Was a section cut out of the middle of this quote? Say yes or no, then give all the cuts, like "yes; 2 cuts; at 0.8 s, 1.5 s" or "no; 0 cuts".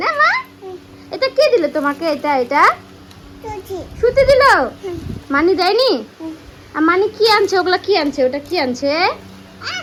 no; 0 cuts